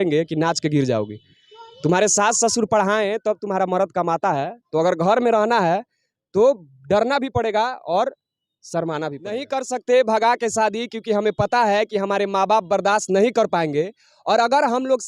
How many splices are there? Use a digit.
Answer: 1